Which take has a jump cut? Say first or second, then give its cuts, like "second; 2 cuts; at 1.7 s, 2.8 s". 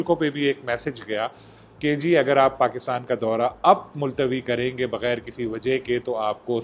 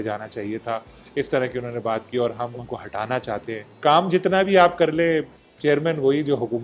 second; 2 cuts; at 2.5 s, 3.7 s